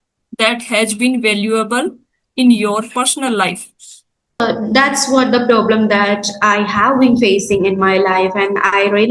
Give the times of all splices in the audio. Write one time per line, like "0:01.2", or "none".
0:04.4